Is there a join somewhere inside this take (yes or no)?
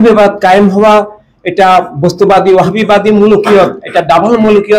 no